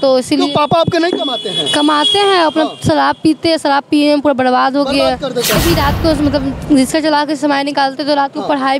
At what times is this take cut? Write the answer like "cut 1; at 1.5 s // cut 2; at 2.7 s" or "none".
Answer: cut 1; at 5.6 s